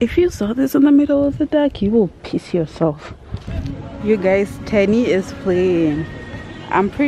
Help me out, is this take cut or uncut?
cut